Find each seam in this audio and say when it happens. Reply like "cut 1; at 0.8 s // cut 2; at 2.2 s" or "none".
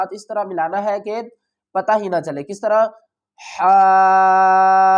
none